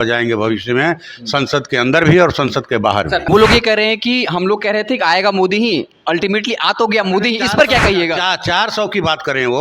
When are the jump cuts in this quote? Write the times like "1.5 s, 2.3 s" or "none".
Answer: 3.2 s